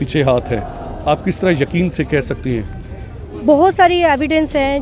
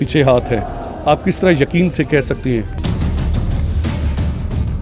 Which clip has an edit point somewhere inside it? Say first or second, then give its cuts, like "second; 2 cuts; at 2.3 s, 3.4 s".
second; 1 cut; at 2.8 s